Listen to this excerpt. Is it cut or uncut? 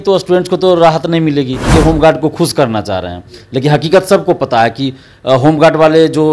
cut